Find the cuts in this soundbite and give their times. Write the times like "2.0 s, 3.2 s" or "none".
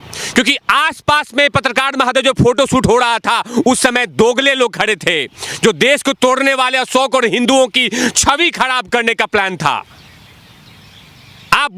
none